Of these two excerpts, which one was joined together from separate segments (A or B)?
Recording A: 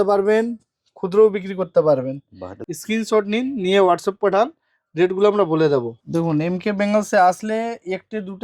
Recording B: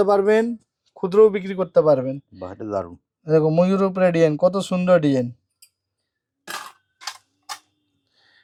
A